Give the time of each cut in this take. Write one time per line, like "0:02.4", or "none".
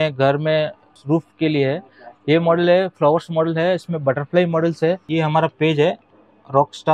0:00.9
0:05.1